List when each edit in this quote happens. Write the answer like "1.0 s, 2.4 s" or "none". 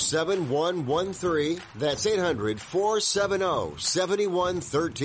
1.7 s